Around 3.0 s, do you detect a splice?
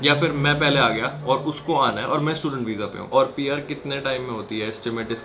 yes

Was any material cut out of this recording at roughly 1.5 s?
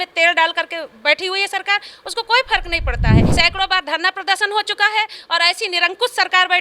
no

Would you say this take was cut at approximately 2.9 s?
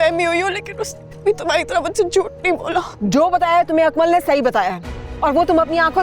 yes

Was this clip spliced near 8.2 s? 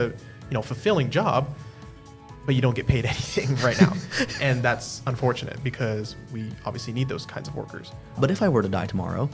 yes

